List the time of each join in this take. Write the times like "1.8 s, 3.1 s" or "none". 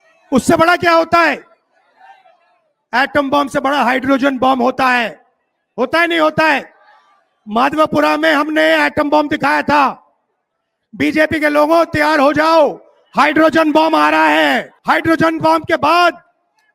14.7 s

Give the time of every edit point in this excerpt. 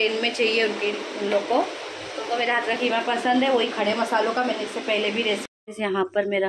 5.5 s

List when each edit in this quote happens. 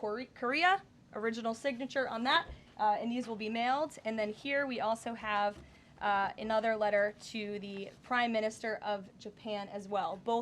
none

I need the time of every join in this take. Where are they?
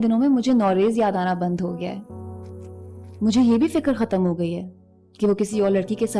none

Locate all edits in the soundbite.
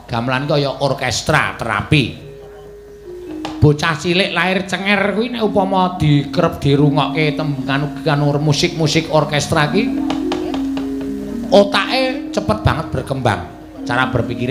none

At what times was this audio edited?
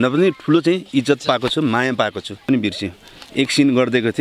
2.5 s

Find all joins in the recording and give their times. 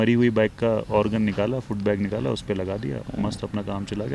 none

